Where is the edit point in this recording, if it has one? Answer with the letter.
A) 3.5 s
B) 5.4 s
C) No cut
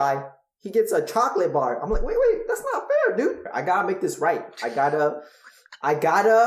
A